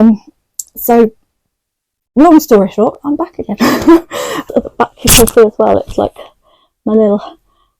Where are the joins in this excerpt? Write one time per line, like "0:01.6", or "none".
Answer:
0:04.4